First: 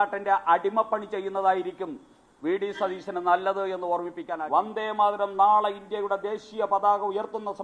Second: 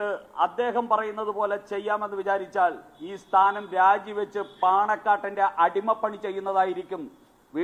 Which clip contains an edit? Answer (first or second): first